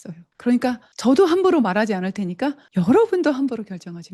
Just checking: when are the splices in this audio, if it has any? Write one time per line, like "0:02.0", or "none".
0:00.9
0:02.6

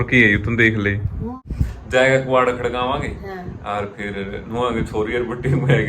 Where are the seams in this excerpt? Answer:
0:01.4

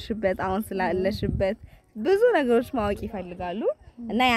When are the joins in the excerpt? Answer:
none

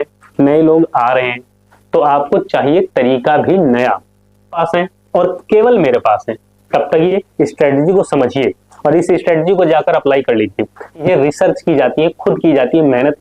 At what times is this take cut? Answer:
0:04.6
0:07.1
0:11.0

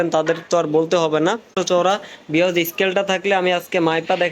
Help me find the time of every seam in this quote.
0:01.5

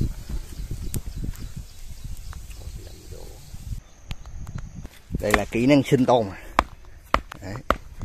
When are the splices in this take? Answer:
0:03.8

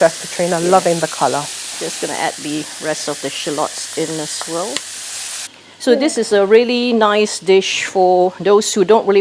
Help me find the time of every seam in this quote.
0:05.3

